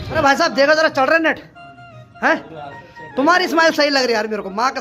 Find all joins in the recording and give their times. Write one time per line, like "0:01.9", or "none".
none